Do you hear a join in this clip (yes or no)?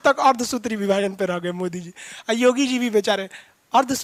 no